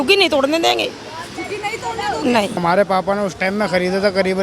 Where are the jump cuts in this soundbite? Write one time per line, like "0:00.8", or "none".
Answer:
0:02.6